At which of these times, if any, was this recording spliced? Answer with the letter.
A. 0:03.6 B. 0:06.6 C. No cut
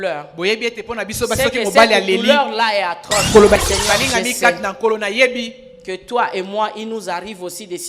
A